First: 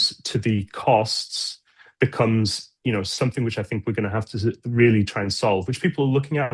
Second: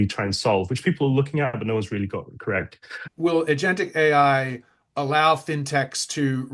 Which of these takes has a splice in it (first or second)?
second